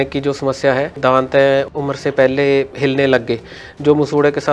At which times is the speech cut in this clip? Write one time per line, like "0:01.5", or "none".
0:01.0